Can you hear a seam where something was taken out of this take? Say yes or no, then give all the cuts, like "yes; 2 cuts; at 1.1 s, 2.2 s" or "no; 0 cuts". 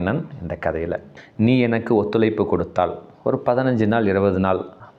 yes; 1 cut; at 1.2 s